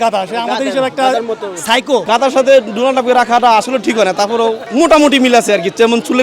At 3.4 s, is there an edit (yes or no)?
no